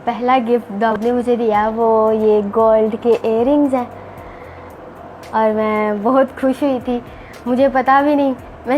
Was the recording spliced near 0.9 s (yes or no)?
yes